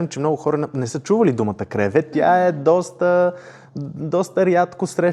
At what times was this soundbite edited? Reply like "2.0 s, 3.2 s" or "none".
none